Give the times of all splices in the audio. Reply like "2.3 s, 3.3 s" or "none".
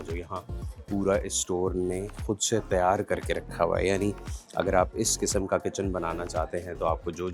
none